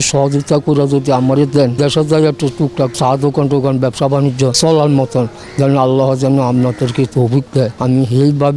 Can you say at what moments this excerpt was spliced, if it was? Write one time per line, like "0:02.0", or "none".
0:01.8
0:02.9
0:04.5
0:07.8